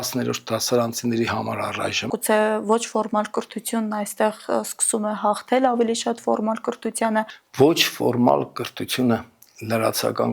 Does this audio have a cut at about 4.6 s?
no; 2 cuts; at 2.2 s, 7.4 s

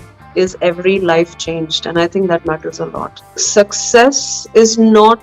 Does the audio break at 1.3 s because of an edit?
no; 1 cut; at 3.4 s

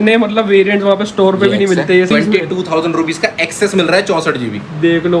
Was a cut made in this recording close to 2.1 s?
yes; 1 cut; at 2.1 s

